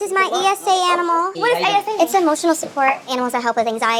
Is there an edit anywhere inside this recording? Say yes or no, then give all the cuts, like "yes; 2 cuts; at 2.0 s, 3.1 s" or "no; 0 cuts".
no; 0 cuts